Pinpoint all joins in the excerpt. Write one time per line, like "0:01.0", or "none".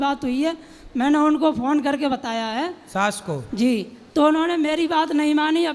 none